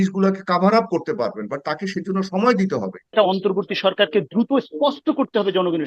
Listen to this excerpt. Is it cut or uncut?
cut